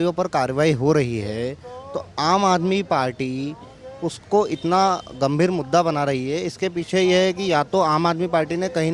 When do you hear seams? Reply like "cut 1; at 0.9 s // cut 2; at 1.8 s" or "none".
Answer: none

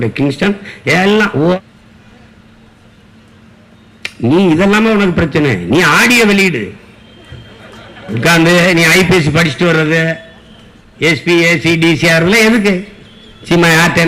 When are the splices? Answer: cut 1; at 1.6 s

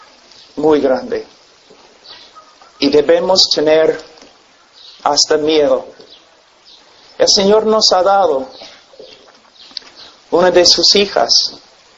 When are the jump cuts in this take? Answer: cut 1; at 3.8 s

